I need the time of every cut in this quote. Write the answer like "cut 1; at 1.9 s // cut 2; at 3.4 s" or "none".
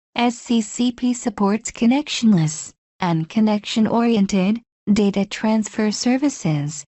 cut 1; at 0.9 s